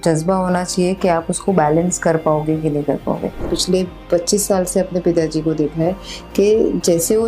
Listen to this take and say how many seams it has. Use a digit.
1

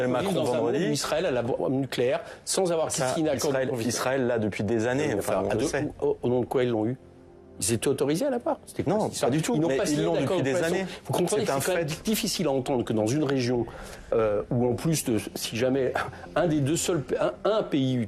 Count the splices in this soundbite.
0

